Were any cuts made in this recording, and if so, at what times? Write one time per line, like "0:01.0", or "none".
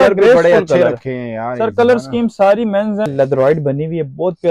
0:03.1